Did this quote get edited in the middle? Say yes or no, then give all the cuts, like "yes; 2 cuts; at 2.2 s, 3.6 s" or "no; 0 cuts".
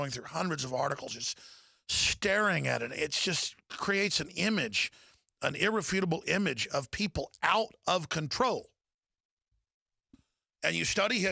yes; 1 cut; at 4.1 s